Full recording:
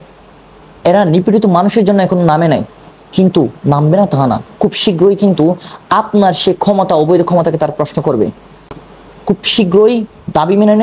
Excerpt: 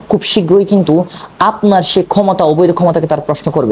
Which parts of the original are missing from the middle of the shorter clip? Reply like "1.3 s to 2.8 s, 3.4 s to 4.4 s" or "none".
none